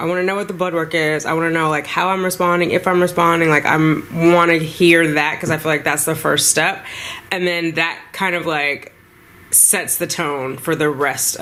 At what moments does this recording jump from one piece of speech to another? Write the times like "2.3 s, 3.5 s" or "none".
none